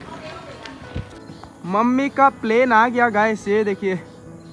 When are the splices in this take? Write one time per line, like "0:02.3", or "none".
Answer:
0:01.2